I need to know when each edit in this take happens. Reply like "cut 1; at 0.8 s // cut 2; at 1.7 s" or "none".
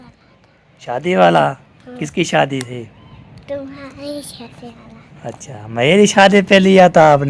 none

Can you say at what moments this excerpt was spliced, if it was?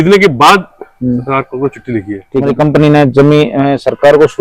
cut 1; at 2.4 s

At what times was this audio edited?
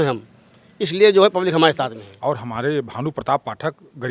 cut 1; at 2.1 s

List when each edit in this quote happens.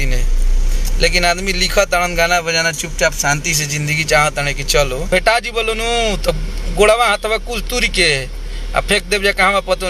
cut 1; at 5.1 s

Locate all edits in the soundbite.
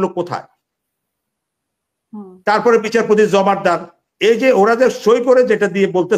none

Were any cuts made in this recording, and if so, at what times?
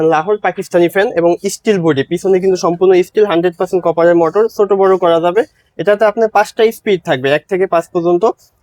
none

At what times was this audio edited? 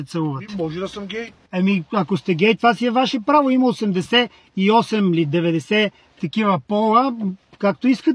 cut 1; at 1.4 s

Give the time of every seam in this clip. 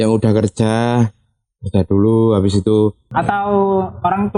cut 1; at 3.0 s

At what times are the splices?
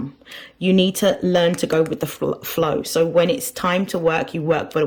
none

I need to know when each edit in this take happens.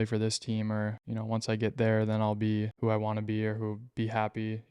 cut 1; at 1.1 s // cut 2; at 2.7 s

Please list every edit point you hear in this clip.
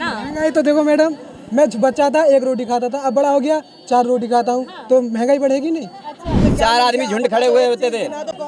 cut 1; at 6.4 s

